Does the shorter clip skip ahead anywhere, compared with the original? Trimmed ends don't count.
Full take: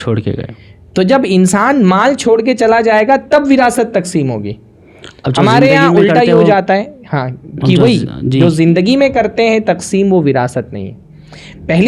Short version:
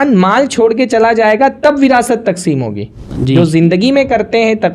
yes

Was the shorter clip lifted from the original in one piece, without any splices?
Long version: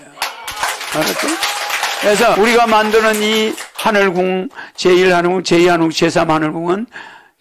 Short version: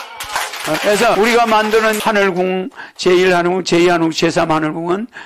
no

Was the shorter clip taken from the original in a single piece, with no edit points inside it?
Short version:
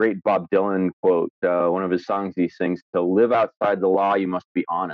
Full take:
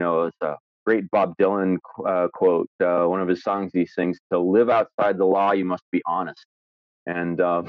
no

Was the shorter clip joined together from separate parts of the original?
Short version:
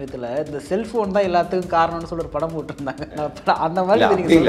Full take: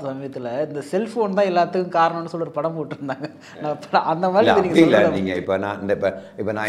yes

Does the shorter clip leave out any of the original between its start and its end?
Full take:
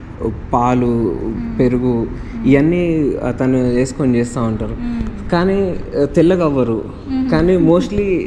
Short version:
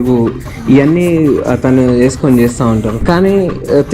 yes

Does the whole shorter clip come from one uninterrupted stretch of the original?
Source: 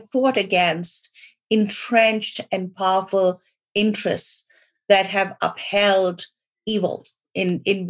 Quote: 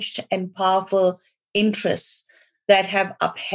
yes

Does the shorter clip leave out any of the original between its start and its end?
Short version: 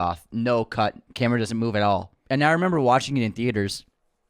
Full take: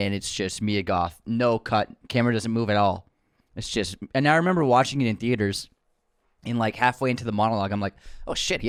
yes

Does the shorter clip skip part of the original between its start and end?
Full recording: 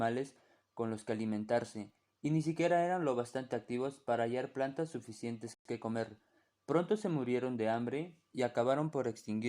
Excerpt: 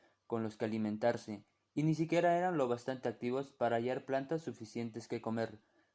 yes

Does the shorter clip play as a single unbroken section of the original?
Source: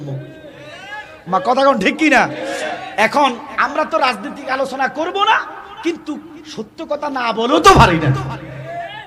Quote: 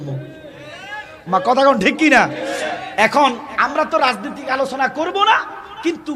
yes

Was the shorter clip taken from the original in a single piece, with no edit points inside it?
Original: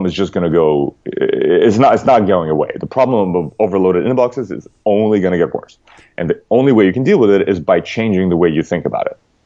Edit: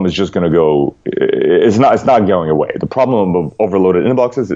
yes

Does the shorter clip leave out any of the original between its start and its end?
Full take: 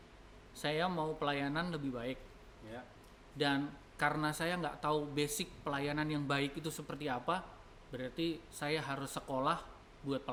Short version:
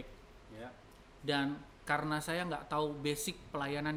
no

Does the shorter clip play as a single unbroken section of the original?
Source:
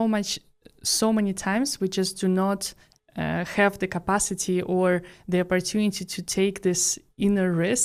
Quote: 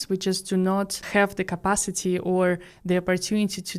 no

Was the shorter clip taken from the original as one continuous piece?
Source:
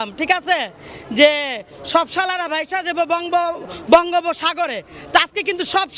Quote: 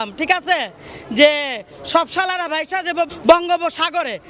no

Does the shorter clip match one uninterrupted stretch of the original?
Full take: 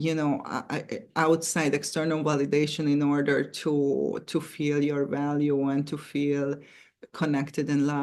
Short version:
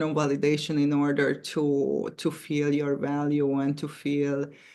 yes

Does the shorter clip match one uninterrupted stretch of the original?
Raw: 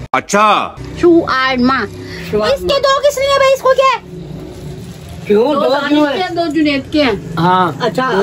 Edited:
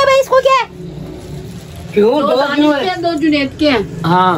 yes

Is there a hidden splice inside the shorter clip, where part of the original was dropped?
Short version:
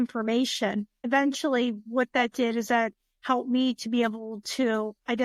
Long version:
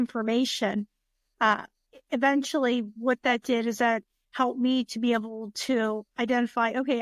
yes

